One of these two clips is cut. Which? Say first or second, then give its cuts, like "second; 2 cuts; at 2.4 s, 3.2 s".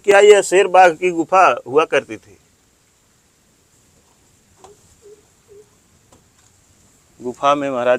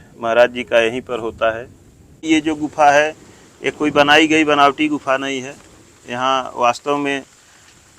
second; 1 cut; at 2.2 s